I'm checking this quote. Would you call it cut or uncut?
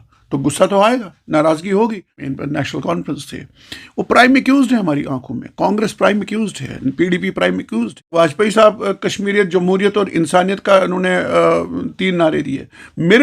cut